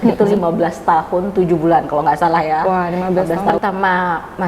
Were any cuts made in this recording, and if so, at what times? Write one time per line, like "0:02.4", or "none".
0:03.6

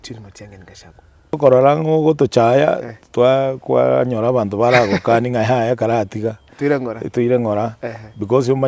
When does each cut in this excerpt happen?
0:01.4

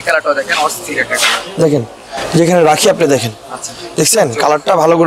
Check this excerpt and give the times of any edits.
none

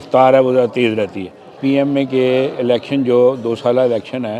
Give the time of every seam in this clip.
0:01.6

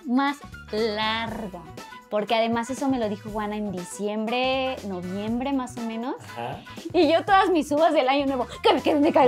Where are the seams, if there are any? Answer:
none

